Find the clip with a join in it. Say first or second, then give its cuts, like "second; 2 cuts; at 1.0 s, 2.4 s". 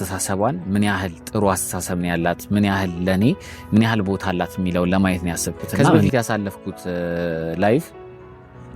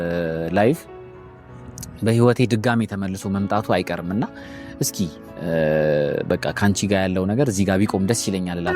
first; 1 cut; at 6.0 s